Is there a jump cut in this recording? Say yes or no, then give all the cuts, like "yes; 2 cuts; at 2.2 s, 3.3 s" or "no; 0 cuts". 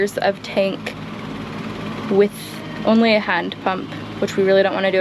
no; 0 cuts